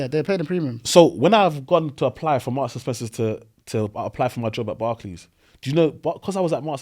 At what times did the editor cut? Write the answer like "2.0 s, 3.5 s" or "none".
none